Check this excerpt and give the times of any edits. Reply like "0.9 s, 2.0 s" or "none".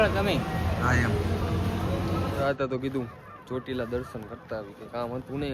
2.4 s